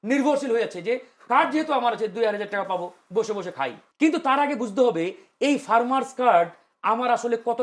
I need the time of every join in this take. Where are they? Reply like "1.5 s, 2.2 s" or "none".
3.8 s